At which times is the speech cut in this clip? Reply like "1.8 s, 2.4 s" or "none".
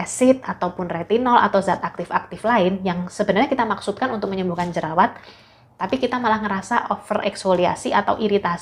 none